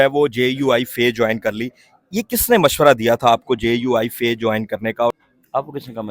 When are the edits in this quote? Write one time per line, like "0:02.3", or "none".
0:05.2